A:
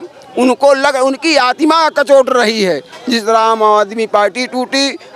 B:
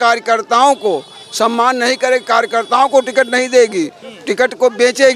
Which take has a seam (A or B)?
A